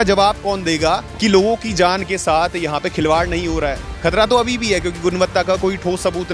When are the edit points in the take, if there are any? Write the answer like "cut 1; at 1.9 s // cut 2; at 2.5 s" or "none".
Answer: cut 1; at 1.1 s // cut 2; at 3.9 s